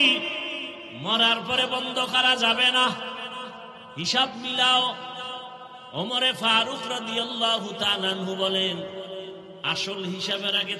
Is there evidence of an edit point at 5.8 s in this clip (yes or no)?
no